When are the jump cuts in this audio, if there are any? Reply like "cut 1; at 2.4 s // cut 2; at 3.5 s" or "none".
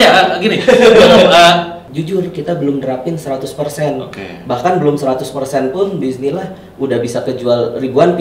cut 1; at 1.8 s